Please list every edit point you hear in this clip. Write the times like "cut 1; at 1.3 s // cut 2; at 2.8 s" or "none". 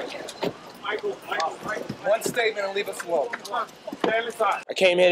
none